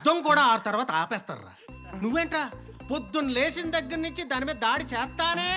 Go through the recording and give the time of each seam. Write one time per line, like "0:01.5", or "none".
none